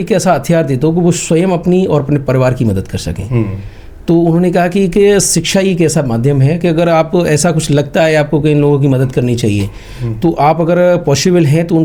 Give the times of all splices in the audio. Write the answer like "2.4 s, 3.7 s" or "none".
none